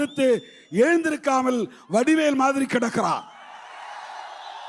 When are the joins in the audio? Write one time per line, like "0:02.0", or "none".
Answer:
none

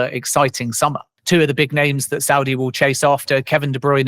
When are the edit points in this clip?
0:01.1

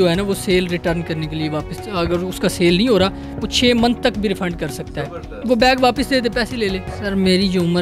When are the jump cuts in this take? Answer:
0:06.9

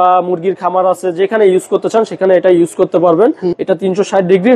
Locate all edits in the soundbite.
0:03.6

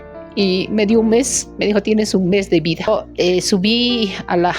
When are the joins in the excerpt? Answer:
0:02.9

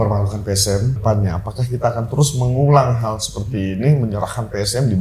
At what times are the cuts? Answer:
0:01.0

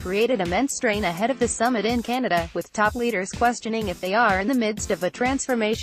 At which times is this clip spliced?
none

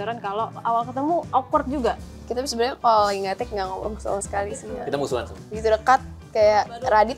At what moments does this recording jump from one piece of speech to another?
0:01.3
0:02.0

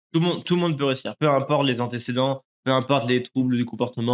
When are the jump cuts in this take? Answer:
none

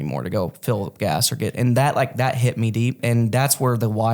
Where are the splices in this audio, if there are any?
0:03.0

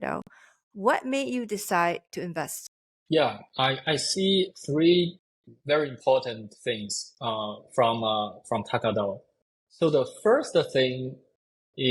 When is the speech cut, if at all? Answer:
0:02.4

